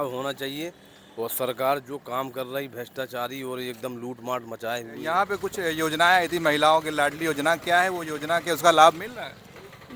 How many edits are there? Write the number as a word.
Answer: one